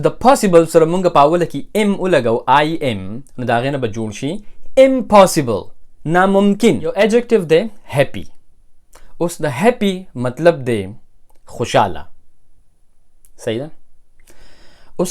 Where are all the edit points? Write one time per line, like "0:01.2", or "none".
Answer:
0:06.9